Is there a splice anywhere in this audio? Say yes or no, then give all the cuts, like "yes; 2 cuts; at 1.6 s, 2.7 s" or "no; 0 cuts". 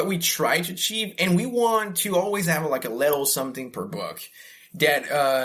no; 0 cuts